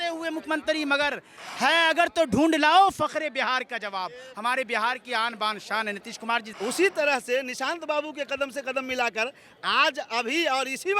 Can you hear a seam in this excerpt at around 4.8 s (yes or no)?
no